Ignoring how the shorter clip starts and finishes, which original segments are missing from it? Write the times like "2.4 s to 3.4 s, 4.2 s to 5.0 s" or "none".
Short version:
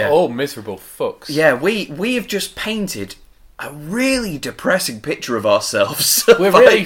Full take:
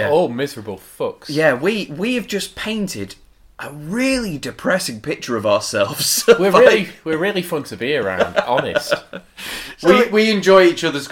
none